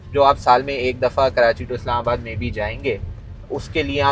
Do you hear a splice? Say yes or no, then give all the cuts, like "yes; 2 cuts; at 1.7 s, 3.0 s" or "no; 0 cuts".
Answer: no; 0 cuts